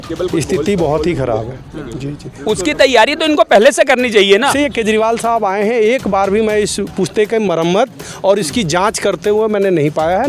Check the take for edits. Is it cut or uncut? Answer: cut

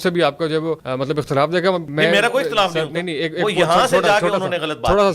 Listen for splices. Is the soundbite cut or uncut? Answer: cut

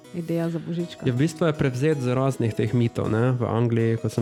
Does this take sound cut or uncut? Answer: uncut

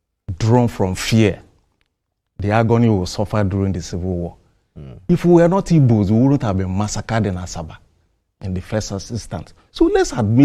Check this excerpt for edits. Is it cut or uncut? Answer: uncut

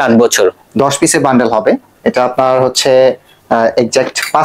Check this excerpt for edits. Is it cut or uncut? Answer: uncut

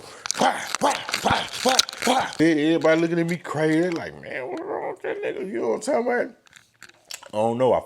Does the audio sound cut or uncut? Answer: cut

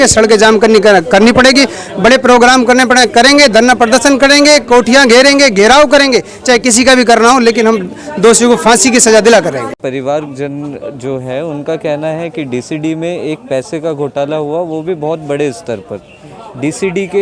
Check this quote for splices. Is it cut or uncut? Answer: uncut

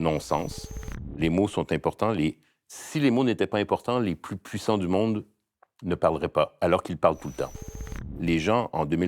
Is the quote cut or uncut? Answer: cut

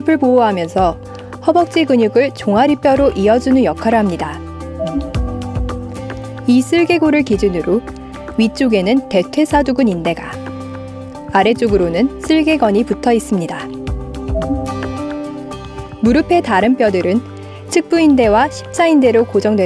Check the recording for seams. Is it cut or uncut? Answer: cut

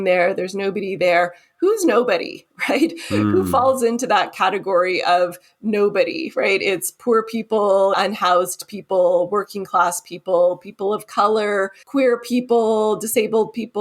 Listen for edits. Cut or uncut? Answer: cut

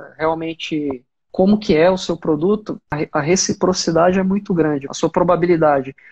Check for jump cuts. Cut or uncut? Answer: cut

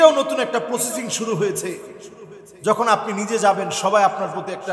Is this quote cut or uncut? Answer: uncut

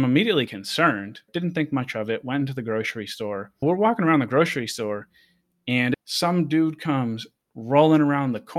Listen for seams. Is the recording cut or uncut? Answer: cut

